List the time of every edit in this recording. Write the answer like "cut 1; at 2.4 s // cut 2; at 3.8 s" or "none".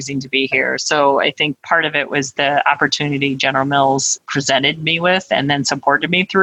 cut 1; at 1.6 s // cut 2; at 4.2 s